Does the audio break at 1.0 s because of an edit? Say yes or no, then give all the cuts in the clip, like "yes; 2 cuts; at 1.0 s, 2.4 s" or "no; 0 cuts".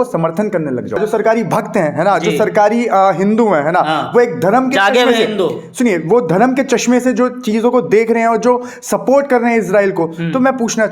yes; 1 cut; at 1.0 s